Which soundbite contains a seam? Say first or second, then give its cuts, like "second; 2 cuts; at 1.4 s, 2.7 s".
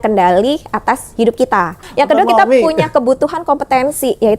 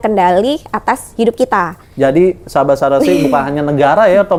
first; 1 cut; at 1.8 s